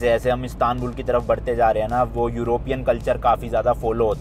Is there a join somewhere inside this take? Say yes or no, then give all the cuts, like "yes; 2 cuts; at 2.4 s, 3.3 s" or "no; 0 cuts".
no; 0 cuts